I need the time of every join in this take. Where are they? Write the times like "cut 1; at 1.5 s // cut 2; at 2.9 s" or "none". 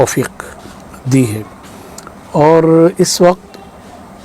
none